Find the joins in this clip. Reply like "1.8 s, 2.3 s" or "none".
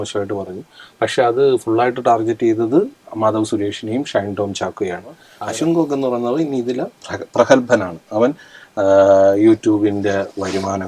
5.3 s